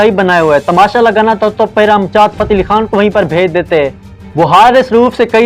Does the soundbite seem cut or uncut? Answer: uncut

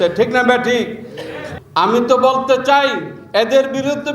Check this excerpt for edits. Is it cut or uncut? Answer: cut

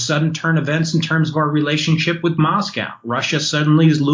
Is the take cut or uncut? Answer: uncut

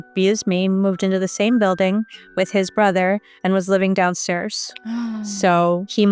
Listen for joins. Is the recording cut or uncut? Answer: uncut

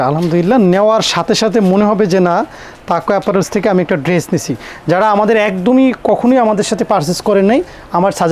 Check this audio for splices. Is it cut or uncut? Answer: uncut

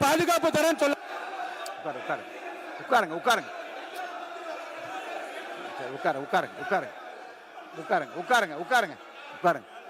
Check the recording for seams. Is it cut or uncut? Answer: uncut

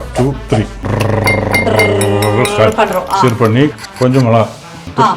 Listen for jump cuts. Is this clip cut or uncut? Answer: cut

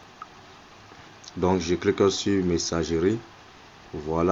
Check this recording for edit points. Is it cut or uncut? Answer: uncut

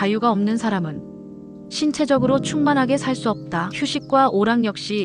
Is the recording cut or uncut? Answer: uncut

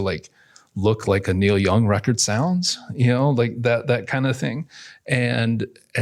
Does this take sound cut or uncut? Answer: uncut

